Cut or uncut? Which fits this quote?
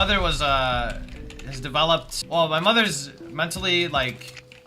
cut